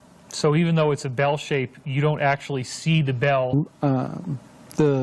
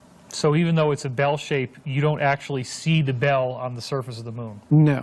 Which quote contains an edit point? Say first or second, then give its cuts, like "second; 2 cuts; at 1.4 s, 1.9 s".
second; 1 cut; at 3.5 s